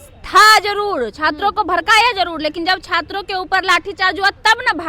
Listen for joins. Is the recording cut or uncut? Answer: uncut